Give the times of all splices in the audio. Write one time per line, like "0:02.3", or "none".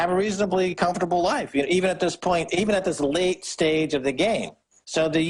0:03.2